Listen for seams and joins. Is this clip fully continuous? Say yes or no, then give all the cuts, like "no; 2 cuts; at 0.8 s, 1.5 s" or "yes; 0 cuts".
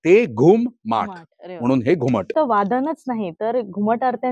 no; 1 cut; at 2.3 s